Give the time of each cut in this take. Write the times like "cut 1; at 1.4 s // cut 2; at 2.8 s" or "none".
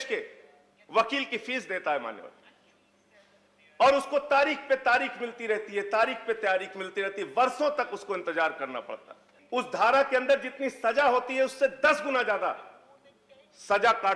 cut 1; at 9.3 s